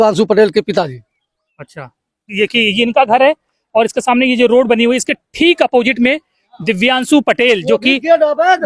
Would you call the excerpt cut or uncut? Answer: cut